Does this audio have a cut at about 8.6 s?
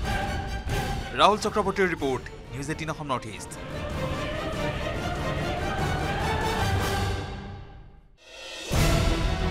yes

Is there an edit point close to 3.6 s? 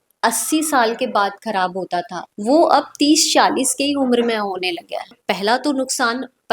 no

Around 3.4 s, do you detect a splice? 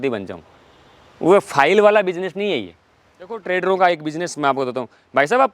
yes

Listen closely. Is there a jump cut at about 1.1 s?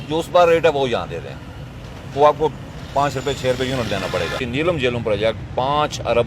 no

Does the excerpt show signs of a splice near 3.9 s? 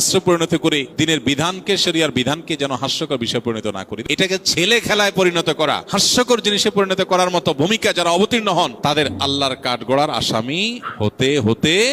yes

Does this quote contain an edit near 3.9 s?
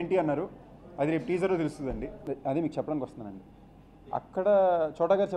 no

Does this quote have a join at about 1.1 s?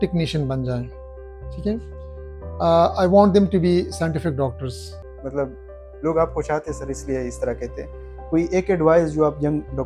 no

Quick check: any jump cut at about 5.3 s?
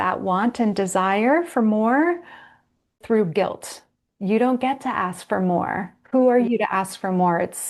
no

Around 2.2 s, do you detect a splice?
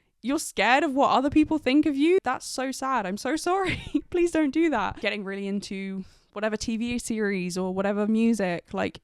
yes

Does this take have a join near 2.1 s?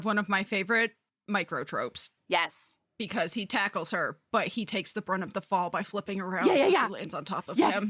yes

